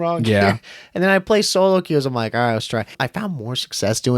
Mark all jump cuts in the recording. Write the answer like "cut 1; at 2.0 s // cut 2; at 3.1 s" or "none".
cut 1; at 3.0 s